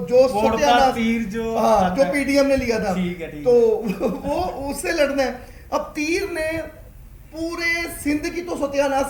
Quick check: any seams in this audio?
no; 0 cuts

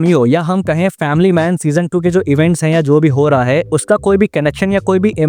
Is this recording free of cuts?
yes; 0 cuts

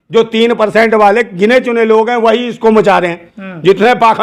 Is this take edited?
no; 0 cuts

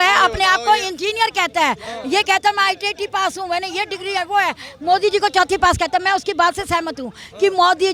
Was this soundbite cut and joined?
no; 0 cuts

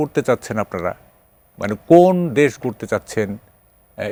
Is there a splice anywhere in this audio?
no; 0 cuts

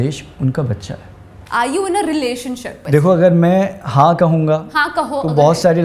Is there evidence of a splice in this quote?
yes; 2 cuts; at 1.4 s, 2.8 s

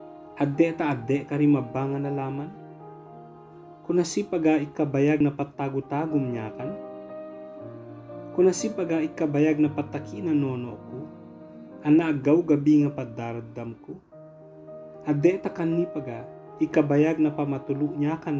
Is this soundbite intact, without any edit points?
yes; 0 cuts

